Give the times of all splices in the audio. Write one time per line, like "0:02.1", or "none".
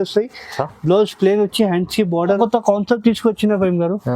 0:02.3

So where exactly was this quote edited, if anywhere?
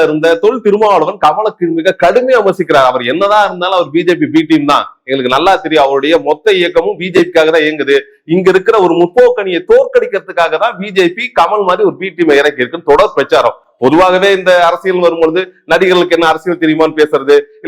none

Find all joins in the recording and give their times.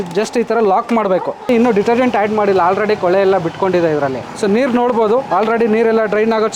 0:01.4
0:04.2

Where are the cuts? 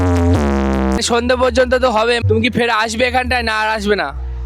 0:01.0
0:02.2

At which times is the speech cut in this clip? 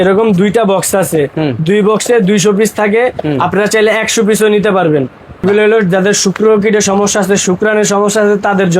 0:05.4

